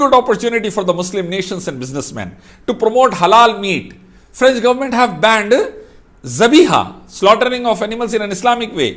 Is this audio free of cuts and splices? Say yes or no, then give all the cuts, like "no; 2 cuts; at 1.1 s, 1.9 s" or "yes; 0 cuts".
yes; 0 cuts